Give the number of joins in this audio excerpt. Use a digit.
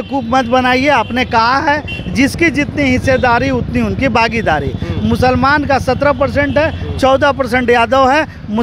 0